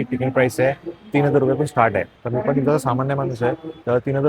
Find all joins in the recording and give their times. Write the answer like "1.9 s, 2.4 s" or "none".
2.2 s